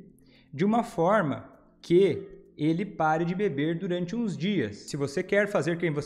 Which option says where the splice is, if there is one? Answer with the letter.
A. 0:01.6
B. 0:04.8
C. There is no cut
B